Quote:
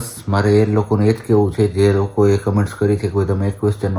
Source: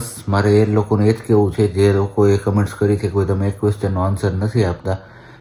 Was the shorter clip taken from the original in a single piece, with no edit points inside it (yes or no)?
yes